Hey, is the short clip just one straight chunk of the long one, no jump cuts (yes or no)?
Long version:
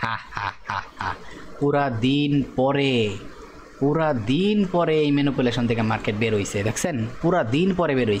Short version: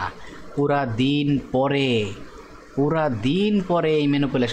yes